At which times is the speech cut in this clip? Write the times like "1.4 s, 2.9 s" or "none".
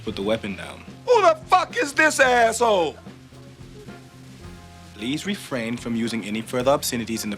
none